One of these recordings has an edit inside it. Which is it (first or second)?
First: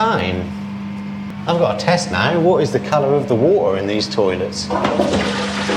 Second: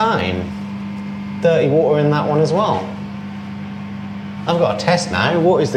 first